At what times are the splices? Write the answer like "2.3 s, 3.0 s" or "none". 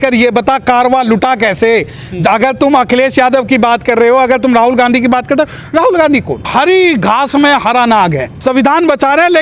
8.3 s